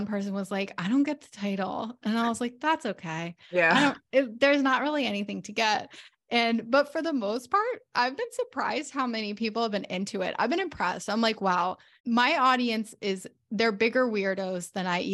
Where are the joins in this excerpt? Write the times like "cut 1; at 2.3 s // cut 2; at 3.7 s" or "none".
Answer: cut 1; at 11.9 s